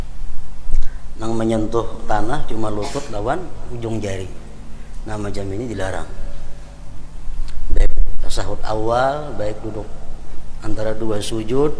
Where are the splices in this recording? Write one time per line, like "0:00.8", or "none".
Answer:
none